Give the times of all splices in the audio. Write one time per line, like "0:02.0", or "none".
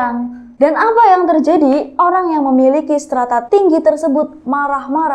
0:03.4